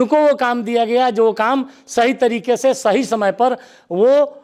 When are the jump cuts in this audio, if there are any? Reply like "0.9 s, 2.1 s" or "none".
none

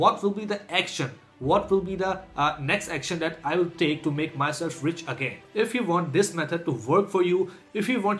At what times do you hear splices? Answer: 5.4 s

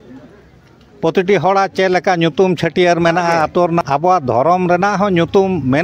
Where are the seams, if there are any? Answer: 3.8 s

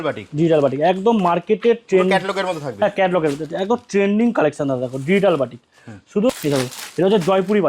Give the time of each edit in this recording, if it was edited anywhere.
6.3 s

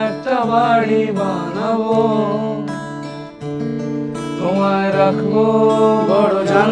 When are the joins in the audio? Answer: none

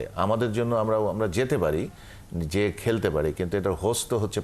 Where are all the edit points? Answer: none

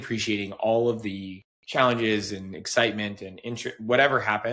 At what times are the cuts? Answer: none

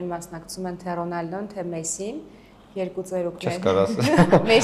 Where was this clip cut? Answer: none

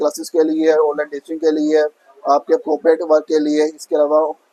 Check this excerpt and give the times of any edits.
none

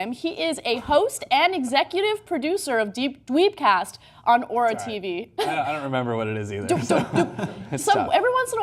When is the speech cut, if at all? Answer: 5.1 s

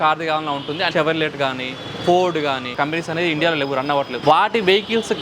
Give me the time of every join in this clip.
0.9 s, 2.7 s, 4.1 s

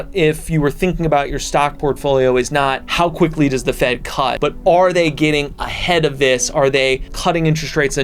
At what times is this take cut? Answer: 2.8 s, 4.4 s, 7.1 s

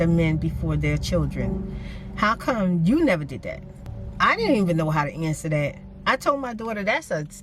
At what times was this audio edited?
none

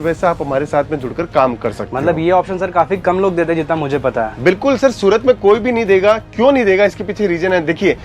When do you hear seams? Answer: none

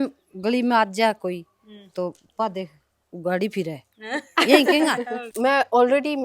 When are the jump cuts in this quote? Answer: 5.2 s

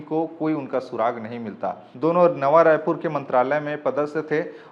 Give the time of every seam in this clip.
1.8 s

